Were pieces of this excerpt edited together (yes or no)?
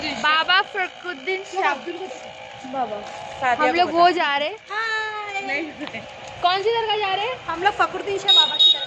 no